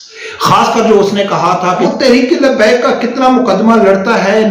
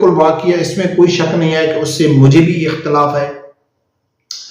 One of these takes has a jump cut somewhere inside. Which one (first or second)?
first